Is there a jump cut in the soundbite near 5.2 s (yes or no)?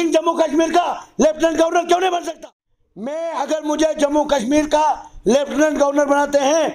no